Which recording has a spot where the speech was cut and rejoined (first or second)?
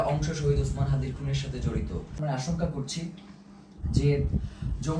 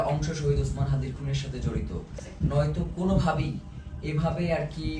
first